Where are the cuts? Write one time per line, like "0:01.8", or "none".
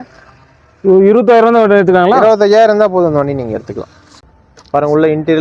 0:04.0